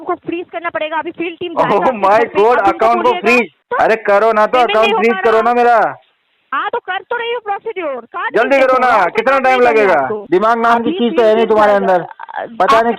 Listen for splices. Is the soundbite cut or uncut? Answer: cut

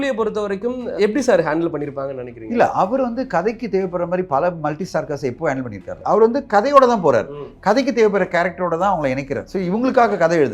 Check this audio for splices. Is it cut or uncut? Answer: cut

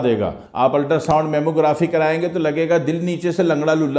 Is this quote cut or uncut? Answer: uncut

